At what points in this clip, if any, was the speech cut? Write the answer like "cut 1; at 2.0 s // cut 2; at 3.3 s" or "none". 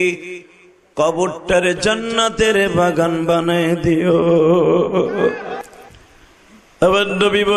cut 1; at 5.6 s

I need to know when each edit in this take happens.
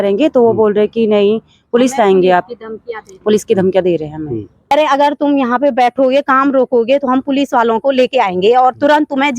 cut 1; at 4.7 s

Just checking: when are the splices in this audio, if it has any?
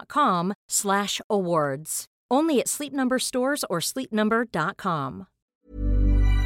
cut 1; at 5.4 s

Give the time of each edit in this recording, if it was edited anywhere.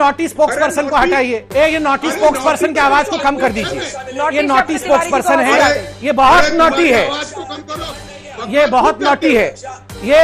cut 1; at 1.4 s

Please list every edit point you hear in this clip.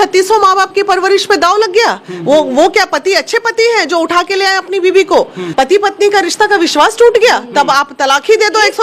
cut 1; at 5.4 s

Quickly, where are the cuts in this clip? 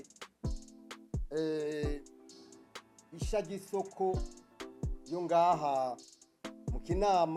none

